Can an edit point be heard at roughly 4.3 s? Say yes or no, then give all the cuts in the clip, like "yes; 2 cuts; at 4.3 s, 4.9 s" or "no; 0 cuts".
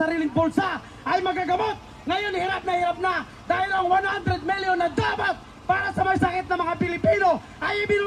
no; 0 cuts